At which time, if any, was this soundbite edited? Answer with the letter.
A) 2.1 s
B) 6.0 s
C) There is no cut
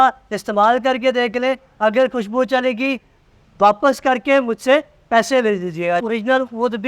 B